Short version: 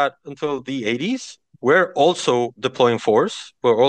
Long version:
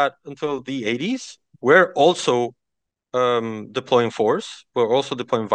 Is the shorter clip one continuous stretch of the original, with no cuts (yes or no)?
no